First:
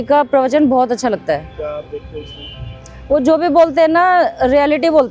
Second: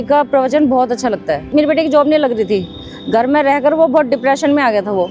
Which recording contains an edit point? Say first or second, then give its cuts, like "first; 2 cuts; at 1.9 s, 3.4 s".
second; 1 cut; at 1.5 s